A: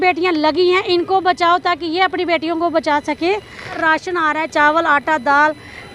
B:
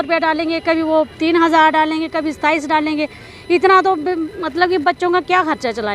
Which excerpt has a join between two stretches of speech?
A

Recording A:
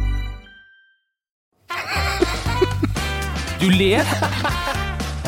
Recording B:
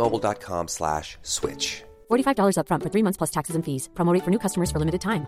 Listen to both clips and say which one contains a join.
A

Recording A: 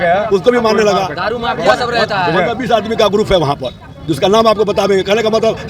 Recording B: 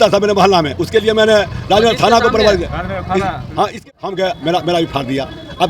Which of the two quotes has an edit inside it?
B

